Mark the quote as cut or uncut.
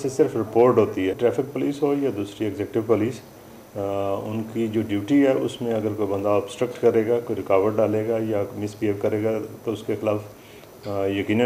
cut